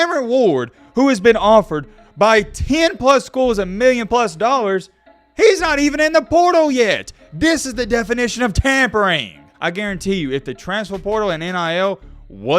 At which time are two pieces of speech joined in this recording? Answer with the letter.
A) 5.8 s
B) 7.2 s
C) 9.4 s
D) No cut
C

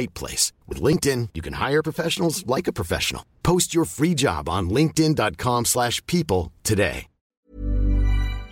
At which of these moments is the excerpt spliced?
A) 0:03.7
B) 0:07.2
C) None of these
B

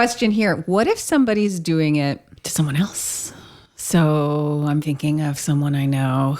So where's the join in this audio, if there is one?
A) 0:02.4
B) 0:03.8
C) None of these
A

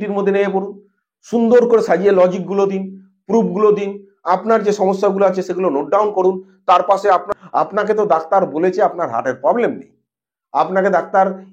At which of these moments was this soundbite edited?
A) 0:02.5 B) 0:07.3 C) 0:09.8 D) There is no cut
B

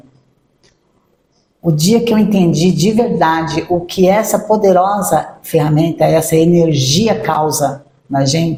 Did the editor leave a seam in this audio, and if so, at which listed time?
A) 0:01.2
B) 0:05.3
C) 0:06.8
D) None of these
D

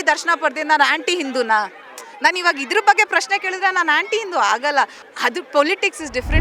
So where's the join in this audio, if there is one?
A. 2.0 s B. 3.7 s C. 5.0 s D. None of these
C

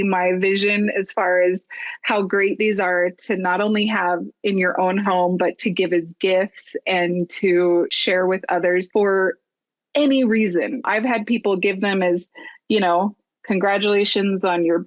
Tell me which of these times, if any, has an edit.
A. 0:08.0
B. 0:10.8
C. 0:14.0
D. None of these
B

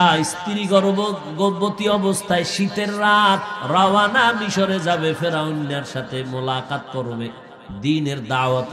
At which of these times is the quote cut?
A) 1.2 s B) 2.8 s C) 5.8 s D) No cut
D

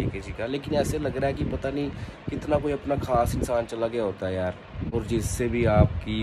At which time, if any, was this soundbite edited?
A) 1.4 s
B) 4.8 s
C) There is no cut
B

